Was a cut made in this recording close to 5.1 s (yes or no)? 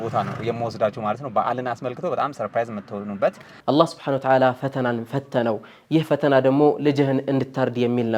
no